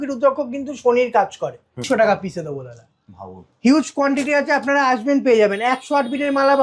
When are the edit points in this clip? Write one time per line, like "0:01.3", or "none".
0:01.8